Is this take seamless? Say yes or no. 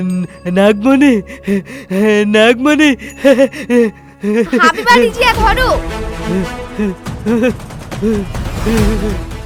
yes